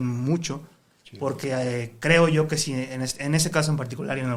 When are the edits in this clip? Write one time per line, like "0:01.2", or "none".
none